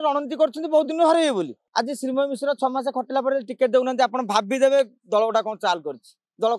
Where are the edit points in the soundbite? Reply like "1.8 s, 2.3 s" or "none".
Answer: 1.6 s